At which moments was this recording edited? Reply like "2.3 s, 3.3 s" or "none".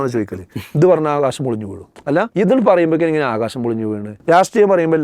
2.1 s, 4.1 s